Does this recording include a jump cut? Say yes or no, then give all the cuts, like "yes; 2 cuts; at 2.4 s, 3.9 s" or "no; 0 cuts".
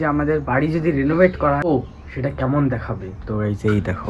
yes; 1 cut; at 1.7 s